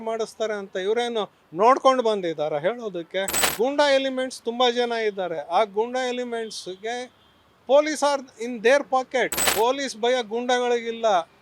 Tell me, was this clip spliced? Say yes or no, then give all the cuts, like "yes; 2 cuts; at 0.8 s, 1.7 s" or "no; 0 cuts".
yes; 2 cuts; at 3.5 s, 9.4 s